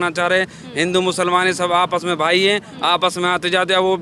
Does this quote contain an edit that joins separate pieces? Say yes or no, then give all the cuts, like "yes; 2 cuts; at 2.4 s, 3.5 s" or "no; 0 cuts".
no; 0 cuts